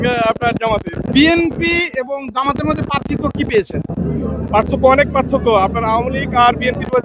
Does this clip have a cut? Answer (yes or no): yes